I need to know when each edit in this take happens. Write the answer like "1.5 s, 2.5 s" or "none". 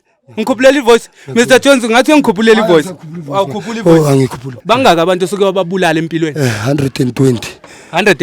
4.5 s